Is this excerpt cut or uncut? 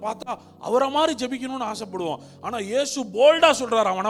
uncut